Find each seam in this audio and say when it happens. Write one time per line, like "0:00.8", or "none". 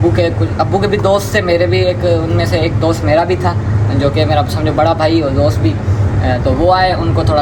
none